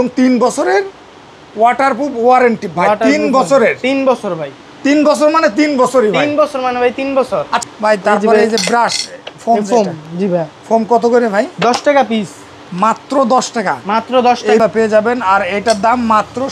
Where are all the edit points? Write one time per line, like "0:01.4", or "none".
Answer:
0:07.6
0:14.6

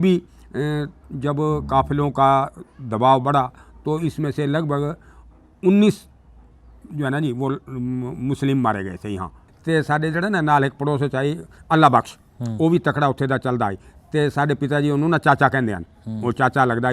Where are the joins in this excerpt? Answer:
0:09.4

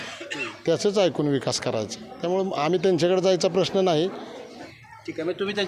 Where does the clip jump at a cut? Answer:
0:04.6

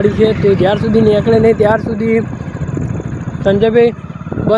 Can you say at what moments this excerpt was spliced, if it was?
none

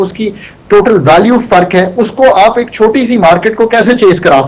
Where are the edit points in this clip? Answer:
none

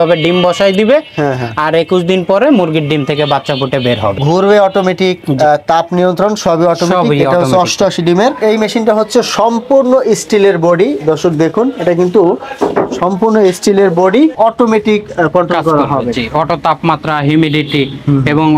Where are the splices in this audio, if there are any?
0:08.4
0:14.3

